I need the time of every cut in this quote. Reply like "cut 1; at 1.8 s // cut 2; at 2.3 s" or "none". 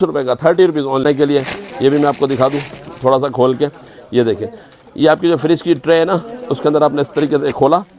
cut 1; at 1.0 s